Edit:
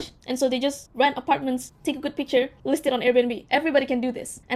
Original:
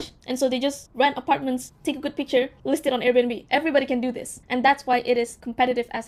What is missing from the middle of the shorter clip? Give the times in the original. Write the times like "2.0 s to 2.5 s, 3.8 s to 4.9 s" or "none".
none